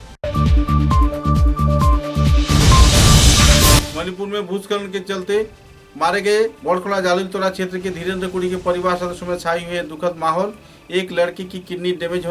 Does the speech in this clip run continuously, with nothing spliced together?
no; 1 cut; at 3.9 s

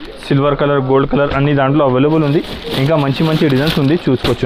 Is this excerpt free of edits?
yes; 0 cuts

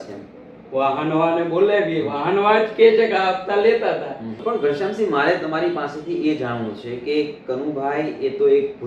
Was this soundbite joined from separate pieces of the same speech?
yes; 1 cut; at 4.4 s

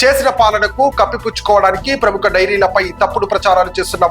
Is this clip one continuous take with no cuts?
yes; 0 cuts

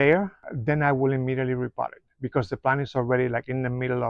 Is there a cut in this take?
no; 0 cuts

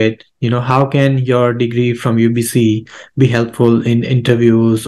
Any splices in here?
no; 0 cuts

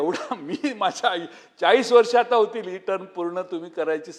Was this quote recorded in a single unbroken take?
yes; 0 cuts

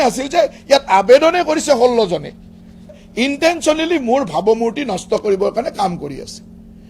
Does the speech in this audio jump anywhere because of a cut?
yes; 1 cut; at 3.0 s

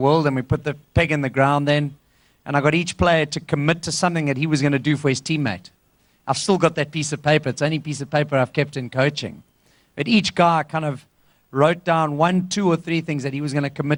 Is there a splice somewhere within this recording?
no; 0 cuts

